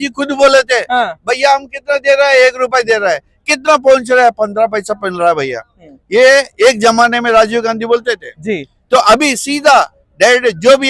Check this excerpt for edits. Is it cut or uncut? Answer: uncut